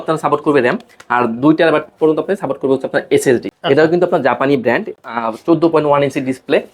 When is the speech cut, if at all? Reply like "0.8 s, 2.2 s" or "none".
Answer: 3.5 s, 5.0 s